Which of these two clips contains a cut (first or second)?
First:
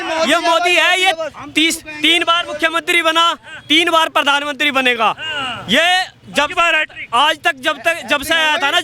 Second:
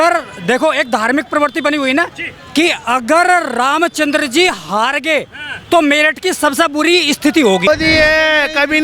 second